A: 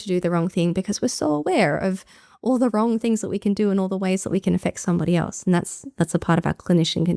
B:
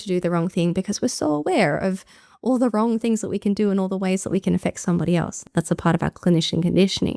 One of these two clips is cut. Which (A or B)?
B